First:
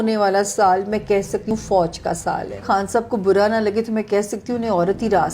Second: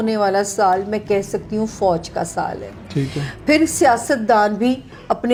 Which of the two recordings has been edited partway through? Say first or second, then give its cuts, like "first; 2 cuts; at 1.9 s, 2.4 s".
first; 2 cuts; at 1.5 s, 2.6 s